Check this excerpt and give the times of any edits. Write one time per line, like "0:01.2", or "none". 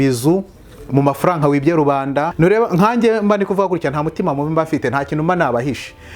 0:02.3